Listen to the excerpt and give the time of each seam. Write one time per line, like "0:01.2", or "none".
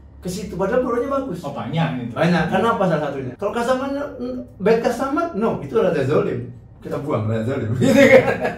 0:03.3